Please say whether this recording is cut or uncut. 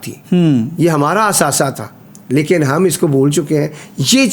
uncut